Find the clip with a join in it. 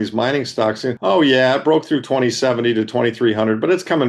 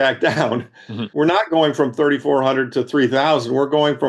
first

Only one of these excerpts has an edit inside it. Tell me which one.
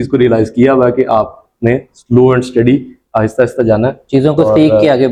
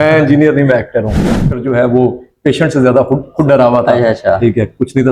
second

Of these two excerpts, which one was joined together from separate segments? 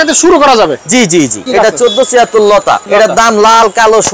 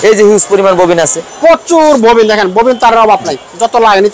first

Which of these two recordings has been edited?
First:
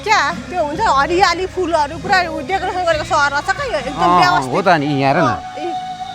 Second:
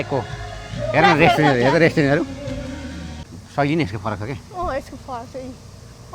second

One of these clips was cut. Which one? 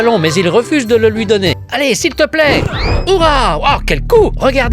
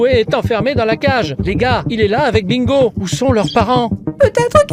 first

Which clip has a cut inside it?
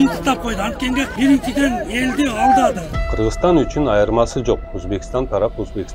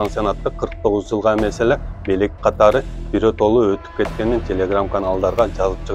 first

